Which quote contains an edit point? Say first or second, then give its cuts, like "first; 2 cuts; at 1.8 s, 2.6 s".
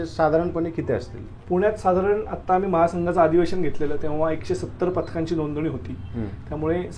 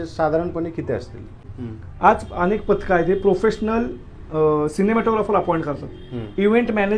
second; 1 cut; at 1.4 s